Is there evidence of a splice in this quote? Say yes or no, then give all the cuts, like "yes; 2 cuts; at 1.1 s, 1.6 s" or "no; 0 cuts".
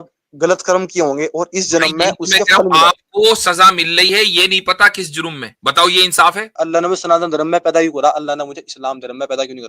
yes; 2 cuts; at 5.5 s, 6.6 s